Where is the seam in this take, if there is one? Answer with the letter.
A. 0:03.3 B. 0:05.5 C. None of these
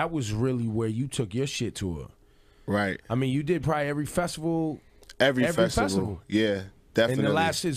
B